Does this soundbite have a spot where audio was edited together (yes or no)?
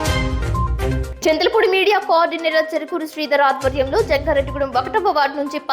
yes